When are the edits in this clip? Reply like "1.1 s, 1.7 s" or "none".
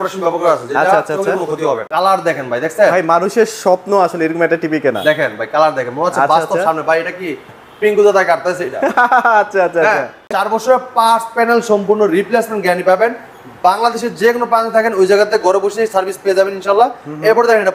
1.8 s, 10.4 s

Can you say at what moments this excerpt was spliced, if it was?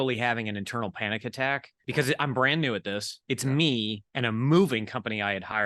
1.8 s, 3.1 s, 4.0 s

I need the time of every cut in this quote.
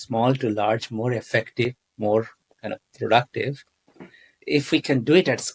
4.4 s

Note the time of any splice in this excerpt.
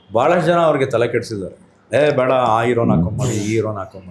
none

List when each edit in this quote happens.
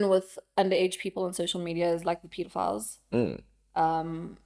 none

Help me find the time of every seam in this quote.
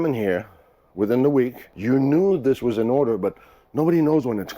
1.7 s

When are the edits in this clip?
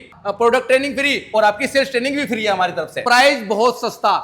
3.0 s

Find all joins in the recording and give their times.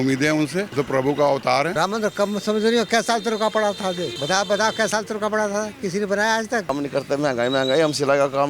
1.7 s, 6.7 s

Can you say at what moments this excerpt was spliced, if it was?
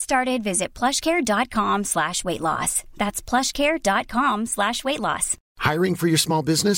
none

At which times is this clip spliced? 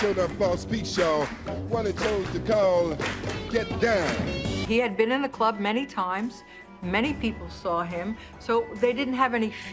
4.4 s

